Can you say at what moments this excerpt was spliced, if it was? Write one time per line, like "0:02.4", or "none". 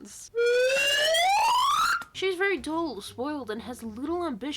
0:02.0

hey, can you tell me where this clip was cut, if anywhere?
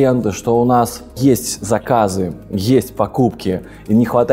0:01.1

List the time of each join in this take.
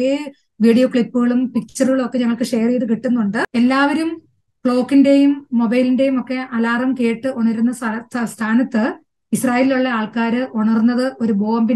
0:03.5

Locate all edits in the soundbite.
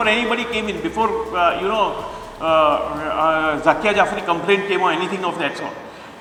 none

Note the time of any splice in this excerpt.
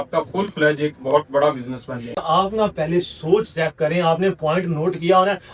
0:02.2

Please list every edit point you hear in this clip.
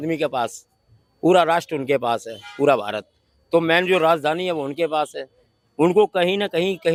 none

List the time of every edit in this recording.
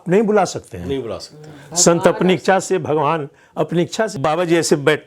0:04.1

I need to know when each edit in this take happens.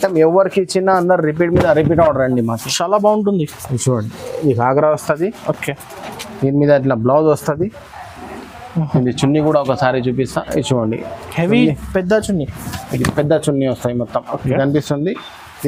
none

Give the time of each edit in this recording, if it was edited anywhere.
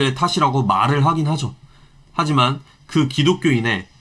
none

